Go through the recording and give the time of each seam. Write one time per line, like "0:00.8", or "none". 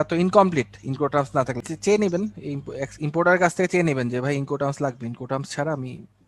0:01.6